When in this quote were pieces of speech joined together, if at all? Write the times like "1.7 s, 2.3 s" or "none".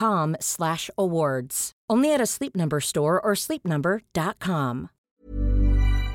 5.1 s